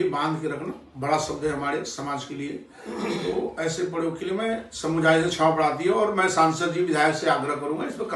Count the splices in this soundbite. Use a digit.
0